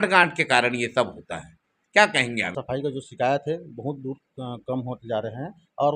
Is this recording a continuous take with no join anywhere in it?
no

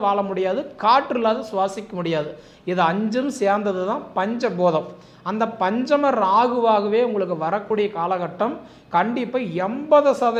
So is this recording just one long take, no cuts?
yes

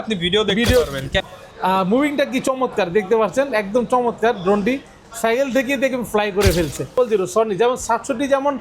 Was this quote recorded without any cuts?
no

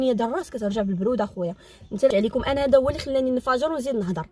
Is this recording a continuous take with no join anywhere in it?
no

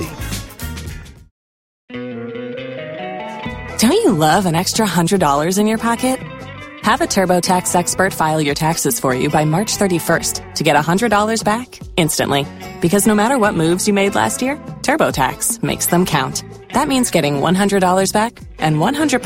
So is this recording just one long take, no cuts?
no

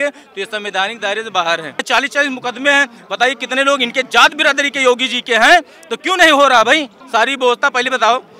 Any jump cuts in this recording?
yes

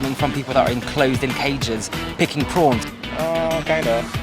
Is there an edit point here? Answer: yes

